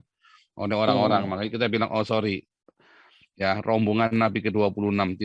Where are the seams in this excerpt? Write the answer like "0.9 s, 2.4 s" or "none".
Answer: none